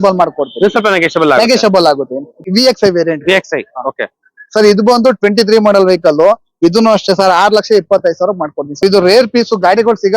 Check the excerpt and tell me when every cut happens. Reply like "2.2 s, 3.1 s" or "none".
2.3 s, 8.8 s